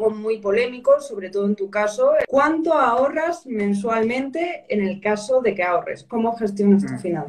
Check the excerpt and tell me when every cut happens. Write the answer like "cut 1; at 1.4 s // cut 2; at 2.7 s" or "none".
cut 1; at 2.2 s